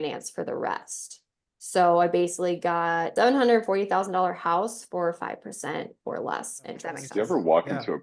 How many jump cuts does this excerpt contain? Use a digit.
2